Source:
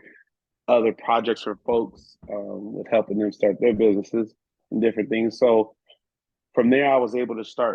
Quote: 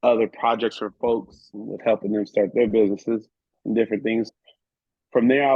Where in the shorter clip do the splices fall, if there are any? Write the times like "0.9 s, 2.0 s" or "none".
1.5 s, 4.3 s